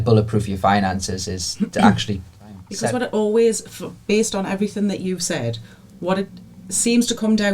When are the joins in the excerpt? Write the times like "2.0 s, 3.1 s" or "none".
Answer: 2.6 s

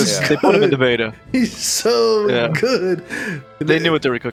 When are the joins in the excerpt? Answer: none

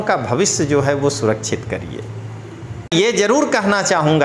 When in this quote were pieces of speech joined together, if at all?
2.9 s

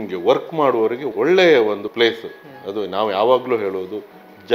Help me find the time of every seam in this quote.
1.1 s, 1.9 s

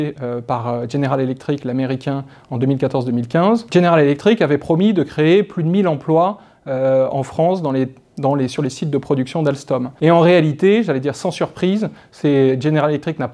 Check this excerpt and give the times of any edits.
9.9 s

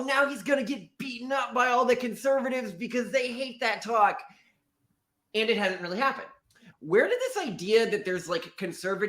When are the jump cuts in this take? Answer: 6.6 s

